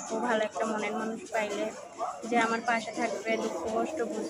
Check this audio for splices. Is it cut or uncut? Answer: uncut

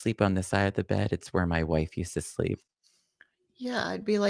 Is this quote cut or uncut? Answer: uncut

